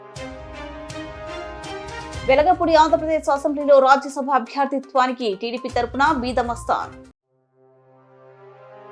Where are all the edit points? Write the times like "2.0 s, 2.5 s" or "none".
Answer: none

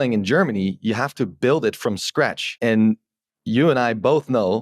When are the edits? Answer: 2.4 s

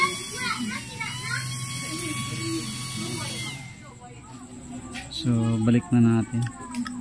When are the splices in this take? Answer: none

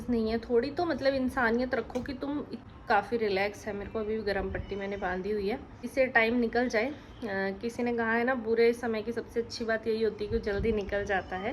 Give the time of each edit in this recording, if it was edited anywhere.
2.6 s, 5.9 s

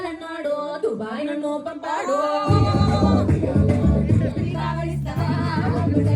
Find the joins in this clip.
none

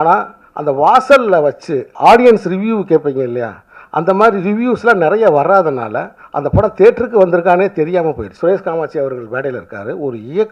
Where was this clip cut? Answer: 1.8 s, 8.3 s

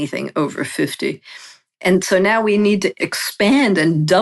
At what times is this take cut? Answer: 3.1 s

